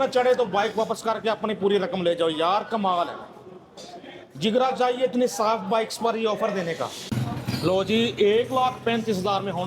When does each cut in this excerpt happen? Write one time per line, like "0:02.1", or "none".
0:07.1